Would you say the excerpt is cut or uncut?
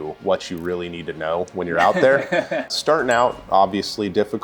cut